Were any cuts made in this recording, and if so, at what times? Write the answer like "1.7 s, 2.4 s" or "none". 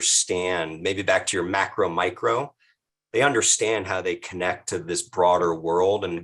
none